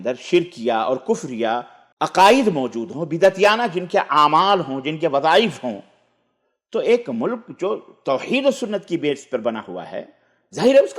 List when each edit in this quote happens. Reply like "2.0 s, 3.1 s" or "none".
1.8 s